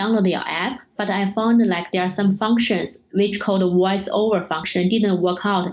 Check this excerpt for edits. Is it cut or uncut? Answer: cut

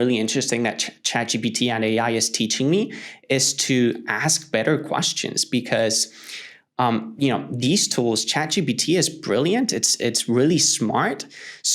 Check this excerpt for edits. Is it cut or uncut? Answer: uncut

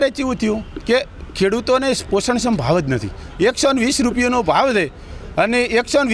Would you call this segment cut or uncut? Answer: uncut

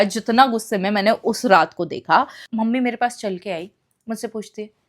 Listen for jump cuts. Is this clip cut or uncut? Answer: cut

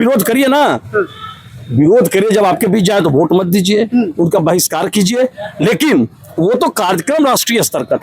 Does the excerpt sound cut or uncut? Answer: uncut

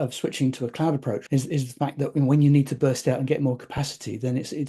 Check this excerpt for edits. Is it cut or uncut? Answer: cut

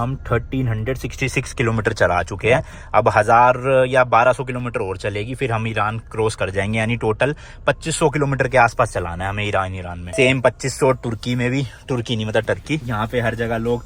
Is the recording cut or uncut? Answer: uncut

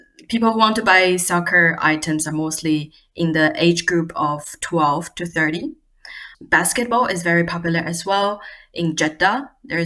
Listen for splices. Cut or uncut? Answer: cut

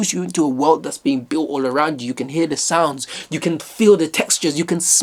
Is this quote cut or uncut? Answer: uncut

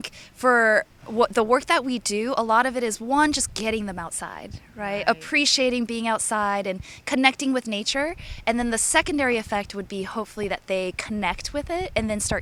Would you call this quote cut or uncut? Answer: uncut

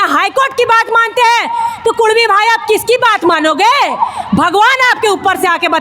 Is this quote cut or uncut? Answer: uncut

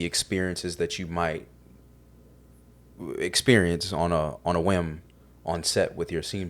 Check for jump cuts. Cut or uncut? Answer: uncut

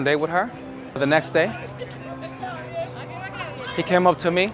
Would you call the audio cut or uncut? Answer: cut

